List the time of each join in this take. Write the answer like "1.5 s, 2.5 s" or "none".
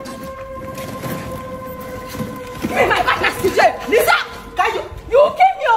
none